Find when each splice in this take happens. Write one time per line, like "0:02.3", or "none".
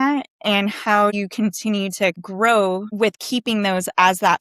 0:01.1
0:02.2
0:02.9